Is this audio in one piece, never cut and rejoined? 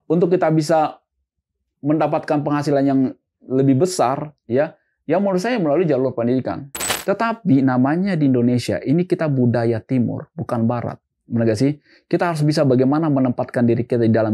no; 1 cut; at 6.8 s

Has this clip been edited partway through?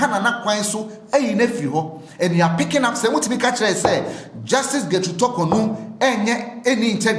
no; 0 cuts

